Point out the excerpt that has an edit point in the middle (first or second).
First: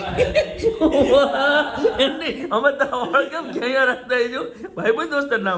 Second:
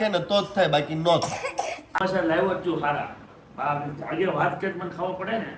second